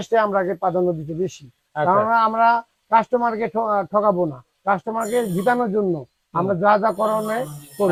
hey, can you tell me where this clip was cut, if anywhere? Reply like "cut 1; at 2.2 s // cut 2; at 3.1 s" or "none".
none